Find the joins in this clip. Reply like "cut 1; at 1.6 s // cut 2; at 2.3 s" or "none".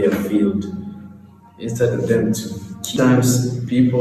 cut 1; at 2.9 s

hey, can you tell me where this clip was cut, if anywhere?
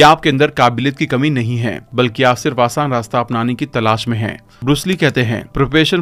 none

